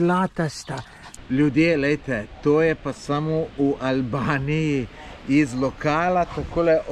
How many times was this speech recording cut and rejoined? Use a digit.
1